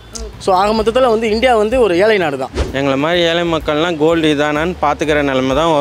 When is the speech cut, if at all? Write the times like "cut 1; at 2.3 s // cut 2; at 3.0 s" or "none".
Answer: cut 1; at 2.5 s